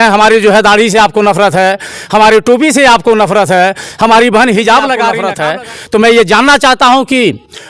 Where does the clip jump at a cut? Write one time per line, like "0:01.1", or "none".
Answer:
0:05.2